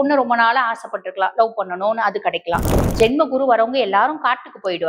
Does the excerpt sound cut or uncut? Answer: cut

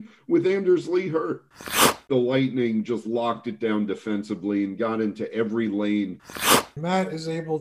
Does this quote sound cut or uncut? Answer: cut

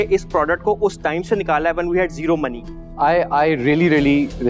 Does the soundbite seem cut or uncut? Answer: uncut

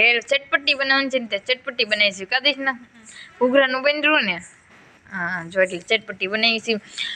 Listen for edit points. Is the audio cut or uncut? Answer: uncut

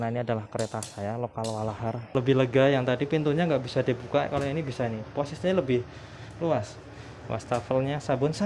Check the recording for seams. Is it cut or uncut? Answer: cut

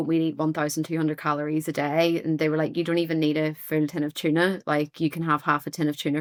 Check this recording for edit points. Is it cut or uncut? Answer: uncut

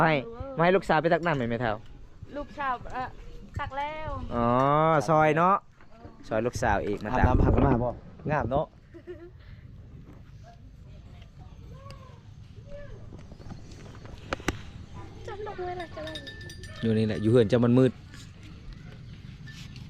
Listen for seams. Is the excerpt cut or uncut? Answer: uncut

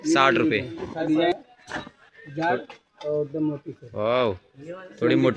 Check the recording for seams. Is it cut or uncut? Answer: cut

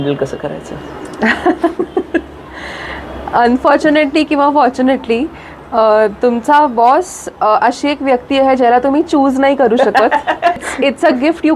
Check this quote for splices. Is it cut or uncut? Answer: uncut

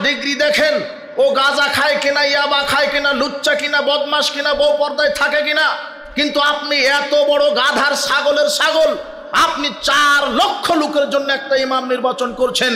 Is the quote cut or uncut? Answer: uncut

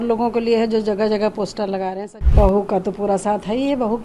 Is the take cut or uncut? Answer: cut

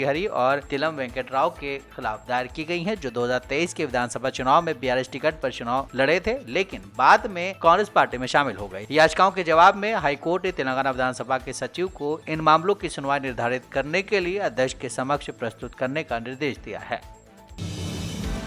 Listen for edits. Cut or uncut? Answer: cut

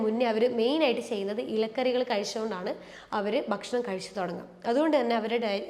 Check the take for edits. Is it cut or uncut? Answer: uncut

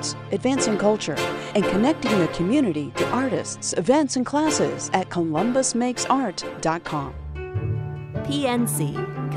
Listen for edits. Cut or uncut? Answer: uncut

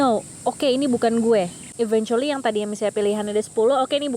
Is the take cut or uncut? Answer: cut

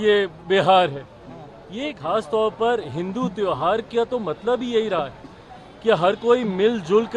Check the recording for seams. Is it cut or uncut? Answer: cut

